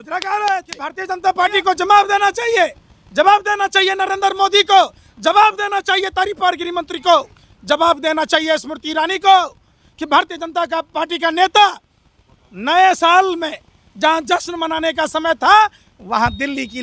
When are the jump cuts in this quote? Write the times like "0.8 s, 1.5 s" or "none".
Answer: 1.1 s